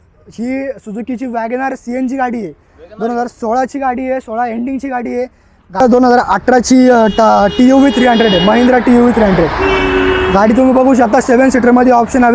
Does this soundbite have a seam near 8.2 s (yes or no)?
no